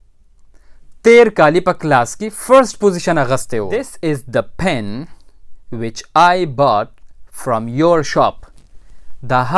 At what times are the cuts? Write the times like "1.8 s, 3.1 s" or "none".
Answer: 3.7 s